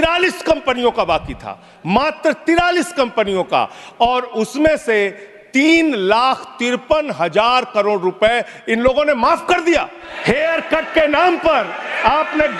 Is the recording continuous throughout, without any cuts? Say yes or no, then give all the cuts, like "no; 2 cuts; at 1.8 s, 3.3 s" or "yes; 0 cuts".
no; 1 cut; at 10.0 s